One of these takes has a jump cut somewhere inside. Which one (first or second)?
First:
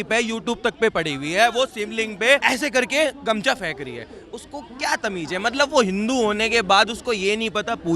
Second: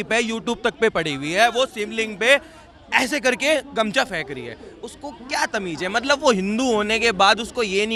first